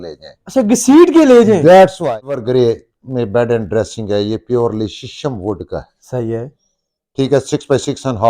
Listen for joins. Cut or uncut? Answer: cut